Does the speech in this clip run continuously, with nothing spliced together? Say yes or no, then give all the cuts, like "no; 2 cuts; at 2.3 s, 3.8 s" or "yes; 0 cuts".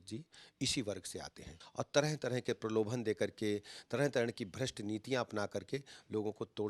no; 1 cut; at 1.6 s